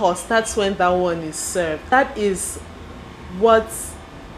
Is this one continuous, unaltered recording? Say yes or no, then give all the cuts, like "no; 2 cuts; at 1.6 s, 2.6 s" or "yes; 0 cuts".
no; 1 cut; at 1.8 s